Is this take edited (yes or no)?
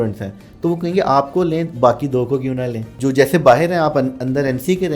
yes